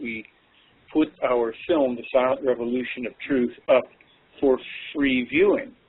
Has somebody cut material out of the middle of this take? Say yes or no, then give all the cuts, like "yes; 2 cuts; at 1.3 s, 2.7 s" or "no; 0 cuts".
no; 0 cuts